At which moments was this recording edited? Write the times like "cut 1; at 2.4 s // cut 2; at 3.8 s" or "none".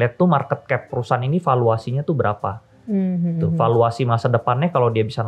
none